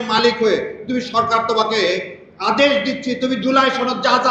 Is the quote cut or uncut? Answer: uncut